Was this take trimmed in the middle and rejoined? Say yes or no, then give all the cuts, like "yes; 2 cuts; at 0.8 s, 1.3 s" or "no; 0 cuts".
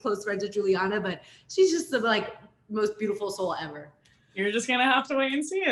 no; 0 cuts